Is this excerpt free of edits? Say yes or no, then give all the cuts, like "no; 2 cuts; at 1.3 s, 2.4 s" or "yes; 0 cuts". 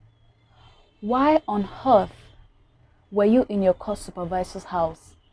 yes; 0 cuts